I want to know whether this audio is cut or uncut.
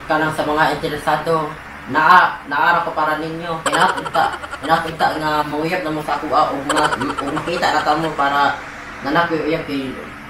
uncut